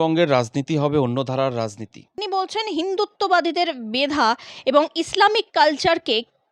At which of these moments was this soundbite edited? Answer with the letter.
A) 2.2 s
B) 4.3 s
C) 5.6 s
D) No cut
A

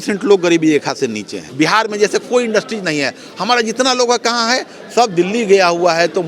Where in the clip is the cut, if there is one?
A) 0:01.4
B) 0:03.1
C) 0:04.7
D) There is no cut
A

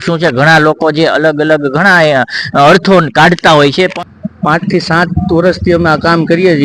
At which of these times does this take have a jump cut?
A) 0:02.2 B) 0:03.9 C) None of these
B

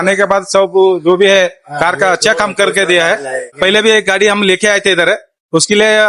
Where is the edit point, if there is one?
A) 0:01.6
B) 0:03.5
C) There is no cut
B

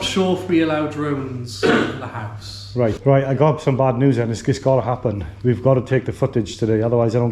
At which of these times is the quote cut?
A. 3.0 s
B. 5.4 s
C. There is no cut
A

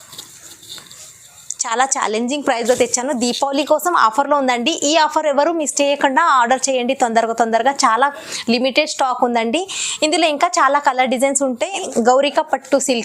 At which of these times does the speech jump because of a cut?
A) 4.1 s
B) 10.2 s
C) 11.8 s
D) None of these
C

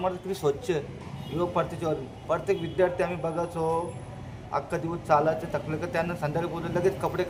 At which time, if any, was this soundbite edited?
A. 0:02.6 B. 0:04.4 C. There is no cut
C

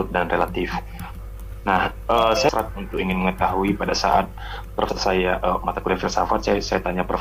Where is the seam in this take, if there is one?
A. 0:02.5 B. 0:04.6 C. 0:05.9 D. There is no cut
D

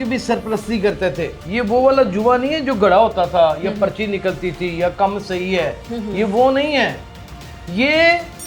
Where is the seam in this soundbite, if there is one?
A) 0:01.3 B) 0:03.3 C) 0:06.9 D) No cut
A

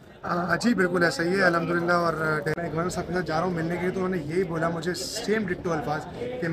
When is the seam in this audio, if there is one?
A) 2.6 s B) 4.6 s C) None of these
A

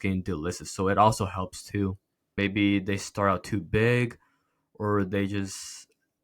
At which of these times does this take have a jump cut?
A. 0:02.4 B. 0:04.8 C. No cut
A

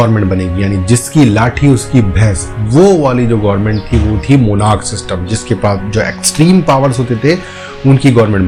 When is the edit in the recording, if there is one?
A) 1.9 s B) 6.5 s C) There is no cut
C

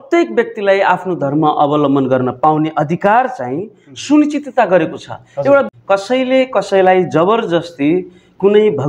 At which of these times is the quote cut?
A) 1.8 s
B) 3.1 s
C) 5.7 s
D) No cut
C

